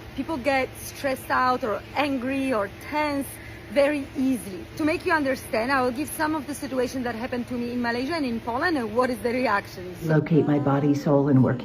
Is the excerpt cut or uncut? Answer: cut